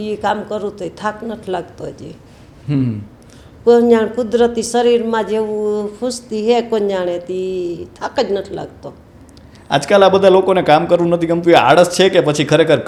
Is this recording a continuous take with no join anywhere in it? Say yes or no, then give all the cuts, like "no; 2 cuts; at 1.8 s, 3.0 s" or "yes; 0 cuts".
yes; 0 cuts